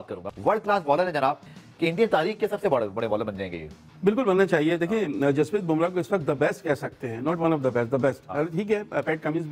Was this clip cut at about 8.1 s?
no; 1 cut; at 1.6 s

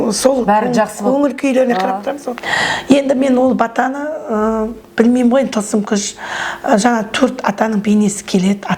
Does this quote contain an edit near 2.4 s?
yes; 1 cut; at 2.4 s

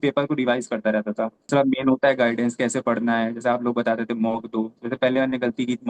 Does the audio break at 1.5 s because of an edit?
yes; 1 cut; at 1.5 s

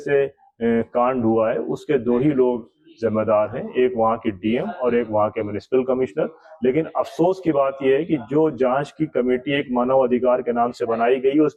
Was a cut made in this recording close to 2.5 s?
no; 0 cuts

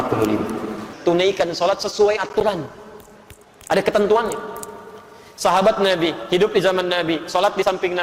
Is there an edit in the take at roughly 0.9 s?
yes; 1 cut; at 0.9 s

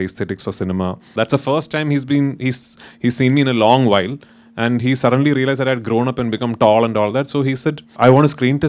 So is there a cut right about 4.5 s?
no; 1 cut; at 1.1 s

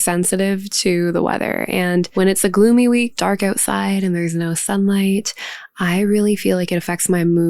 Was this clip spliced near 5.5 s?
no; 2 cuts; at 2.1 s, 3.1 s

